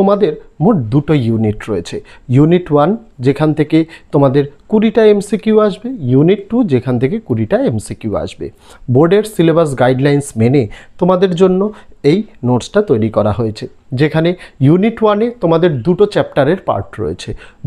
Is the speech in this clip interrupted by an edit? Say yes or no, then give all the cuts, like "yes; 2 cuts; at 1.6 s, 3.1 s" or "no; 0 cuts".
no; 0 cuts